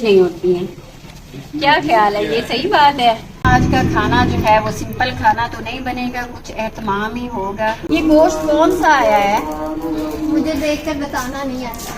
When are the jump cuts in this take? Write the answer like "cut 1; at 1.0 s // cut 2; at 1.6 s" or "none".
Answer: cut 1; at 3.4 s // cut 2; at 7.8 s